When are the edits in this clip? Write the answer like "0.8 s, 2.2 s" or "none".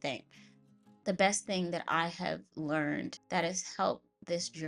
0.9 s, 3.2 s

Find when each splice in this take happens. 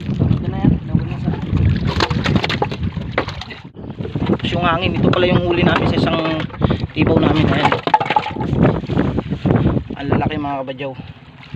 3.9 s

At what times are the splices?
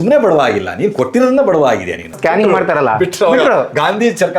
2.2 s

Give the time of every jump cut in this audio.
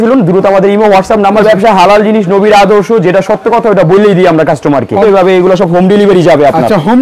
1.4 s, 5.0 s

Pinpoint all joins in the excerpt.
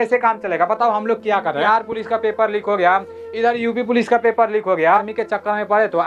1.6 s, 4.8 s

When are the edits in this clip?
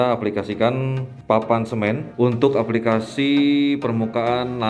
1.1 s, 2.1 s

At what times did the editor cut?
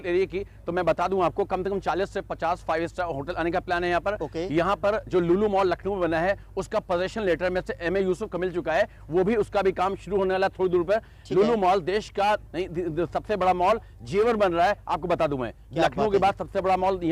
none

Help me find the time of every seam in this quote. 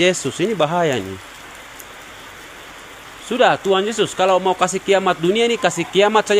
none

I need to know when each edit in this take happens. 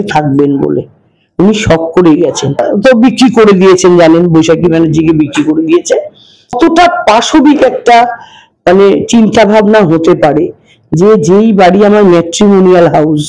2.6 s, 6.6 s

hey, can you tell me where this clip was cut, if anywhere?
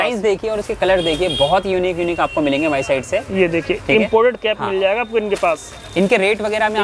none

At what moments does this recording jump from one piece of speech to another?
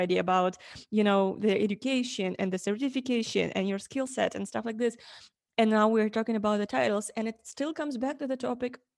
none

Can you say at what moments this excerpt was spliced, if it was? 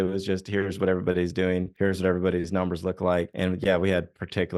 1.7 s, 3.3 s

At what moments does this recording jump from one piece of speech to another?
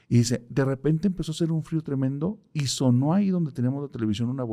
none

